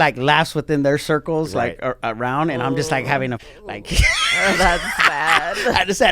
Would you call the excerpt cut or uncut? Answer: cut